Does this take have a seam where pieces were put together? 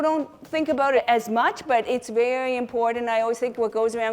yes; 1 cut; at 1.0 s

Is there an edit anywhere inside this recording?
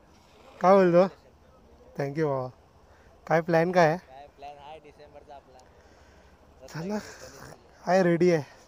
no; 0 cuts

